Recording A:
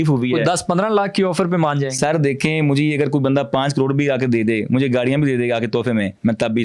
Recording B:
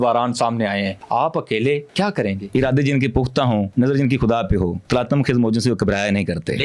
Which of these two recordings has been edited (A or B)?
B